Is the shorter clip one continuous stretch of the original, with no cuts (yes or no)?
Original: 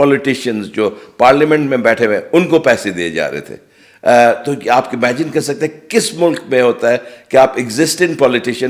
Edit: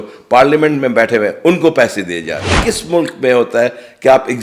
no